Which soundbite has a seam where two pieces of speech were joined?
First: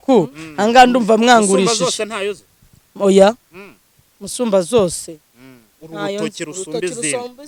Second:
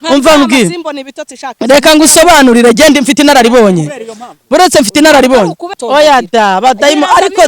second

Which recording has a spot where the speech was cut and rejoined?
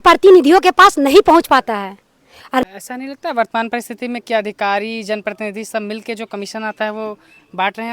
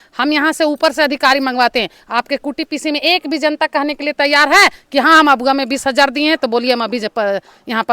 first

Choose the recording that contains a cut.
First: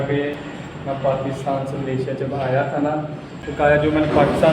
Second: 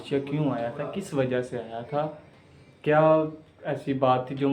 first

